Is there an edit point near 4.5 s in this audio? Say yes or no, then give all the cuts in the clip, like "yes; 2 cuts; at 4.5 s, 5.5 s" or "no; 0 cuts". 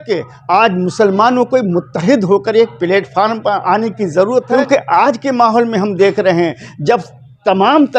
yes; 1 cut; at 4.5 s